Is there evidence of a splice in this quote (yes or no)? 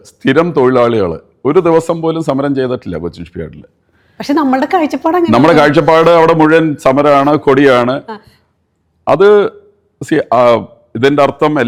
no